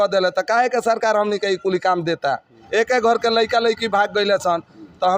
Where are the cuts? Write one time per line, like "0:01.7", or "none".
0:02.6

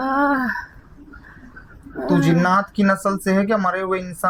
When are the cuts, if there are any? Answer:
none

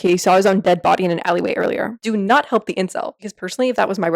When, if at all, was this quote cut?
0:02.0
0:03.2

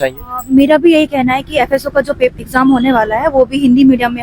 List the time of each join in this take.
none

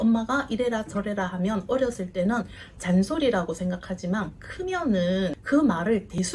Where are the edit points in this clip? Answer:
none

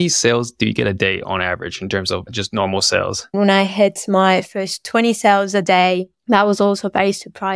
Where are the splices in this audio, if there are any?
0:03.3

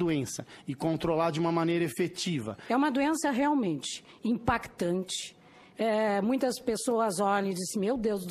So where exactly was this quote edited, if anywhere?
0:02.5

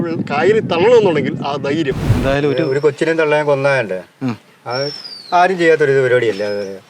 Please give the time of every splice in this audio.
0:02.1

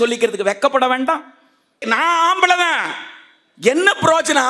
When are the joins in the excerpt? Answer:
0:01.9

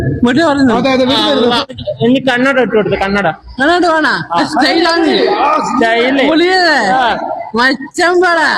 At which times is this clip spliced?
0:01.7

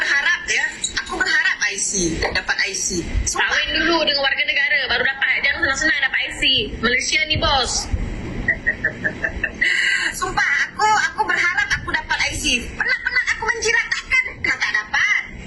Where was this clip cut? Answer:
none

